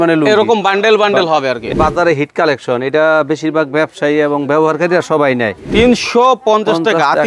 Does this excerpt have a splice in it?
yes; 2 cuts; at 1.7 s, 5.6 s

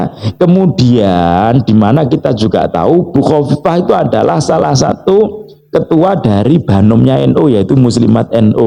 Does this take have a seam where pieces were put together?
no; 0 cuts

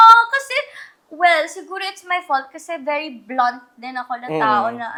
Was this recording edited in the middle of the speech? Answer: no; 0 cuts

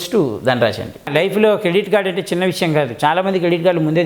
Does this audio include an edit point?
yes; 1 cut; at 1.1 s

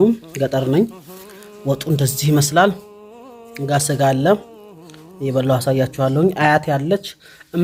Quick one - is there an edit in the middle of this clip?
no; 0 cuts

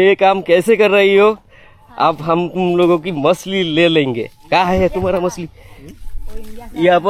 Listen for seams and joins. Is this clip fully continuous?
yes; 0 cuts

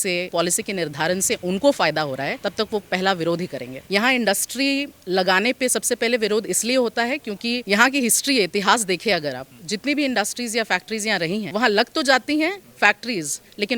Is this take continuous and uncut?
yes; 0 cuts

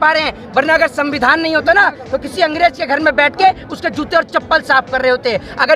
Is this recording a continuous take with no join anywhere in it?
yes; 0 cuts

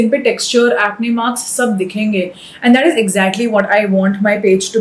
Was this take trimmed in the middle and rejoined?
no; 0 cuts

